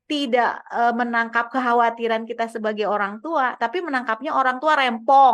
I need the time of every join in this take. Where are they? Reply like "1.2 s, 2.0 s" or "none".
none